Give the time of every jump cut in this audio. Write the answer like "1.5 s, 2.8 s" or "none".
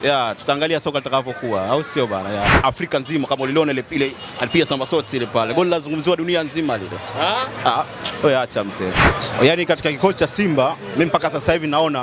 2.5 s, 9.0 s